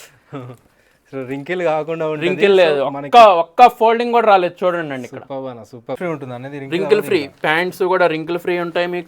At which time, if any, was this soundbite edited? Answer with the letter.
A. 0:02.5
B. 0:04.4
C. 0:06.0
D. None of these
C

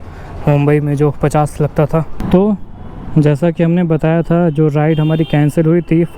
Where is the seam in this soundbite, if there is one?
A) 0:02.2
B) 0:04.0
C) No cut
A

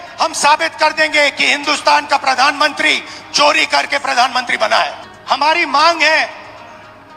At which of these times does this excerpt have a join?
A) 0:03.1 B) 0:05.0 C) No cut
B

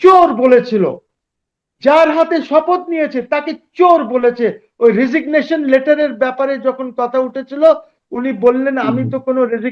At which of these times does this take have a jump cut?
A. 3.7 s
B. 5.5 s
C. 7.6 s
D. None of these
D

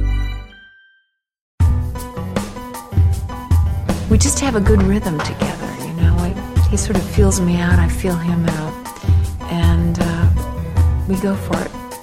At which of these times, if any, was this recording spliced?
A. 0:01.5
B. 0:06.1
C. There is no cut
A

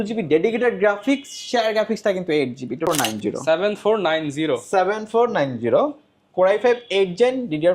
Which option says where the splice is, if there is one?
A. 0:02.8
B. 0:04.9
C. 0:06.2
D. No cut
A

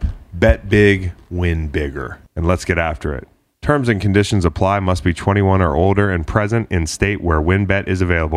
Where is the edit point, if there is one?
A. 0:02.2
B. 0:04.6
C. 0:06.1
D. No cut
A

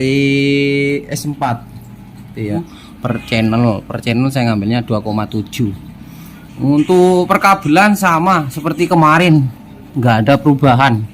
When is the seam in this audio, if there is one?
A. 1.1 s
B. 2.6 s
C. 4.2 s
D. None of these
B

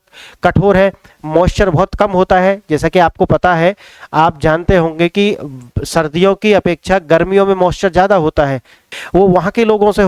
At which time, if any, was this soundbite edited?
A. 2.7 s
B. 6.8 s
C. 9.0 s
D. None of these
C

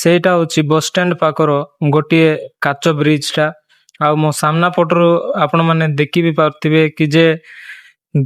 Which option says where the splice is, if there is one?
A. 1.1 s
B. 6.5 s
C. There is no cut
C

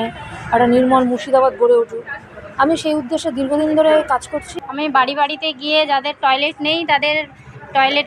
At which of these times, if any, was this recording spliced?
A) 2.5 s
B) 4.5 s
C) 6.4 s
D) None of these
B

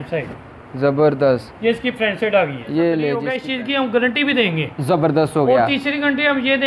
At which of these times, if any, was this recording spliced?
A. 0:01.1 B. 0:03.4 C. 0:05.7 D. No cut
B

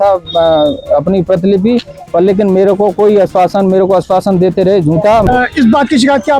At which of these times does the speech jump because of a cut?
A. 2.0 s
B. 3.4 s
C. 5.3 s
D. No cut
C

